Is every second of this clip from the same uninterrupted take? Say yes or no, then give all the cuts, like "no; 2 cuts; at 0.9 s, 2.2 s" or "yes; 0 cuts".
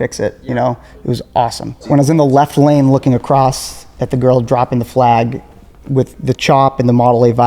no; 1 cut; at 1.9 s